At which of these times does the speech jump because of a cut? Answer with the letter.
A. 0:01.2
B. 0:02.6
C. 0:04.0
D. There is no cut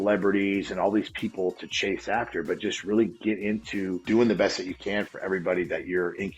C